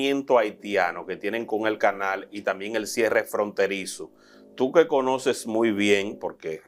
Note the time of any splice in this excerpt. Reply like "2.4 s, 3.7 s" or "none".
none